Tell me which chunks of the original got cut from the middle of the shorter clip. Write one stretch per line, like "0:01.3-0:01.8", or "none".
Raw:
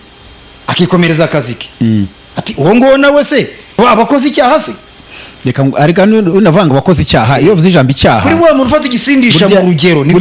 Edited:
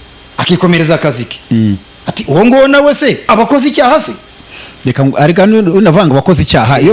0:03.6-0:03.9